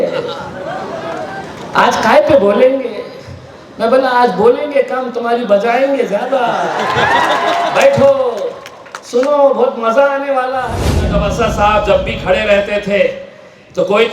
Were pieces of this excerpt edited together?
yes; 1 cut; at 11.2 s

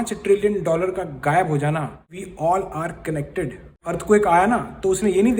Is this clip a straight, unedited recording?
no; 2 cuts; at 2.2 s, 3.9 s

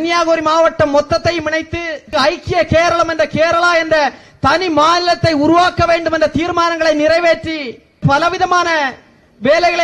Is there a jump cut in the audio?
yes; 2 cuts; at 2.1 s, 8.0 s

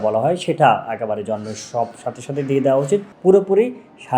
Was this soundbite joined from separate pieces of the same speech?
yes; 1 cut; at 3.1 s

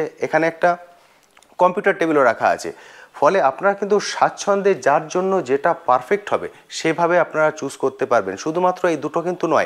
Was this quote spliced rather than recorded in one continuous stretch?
no; 0 cuts

